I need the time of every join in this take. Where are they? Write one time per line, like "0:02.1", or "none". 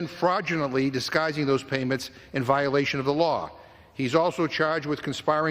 0:03.6